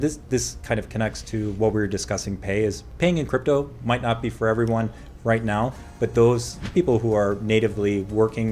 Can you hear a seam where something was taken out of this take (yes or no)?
yes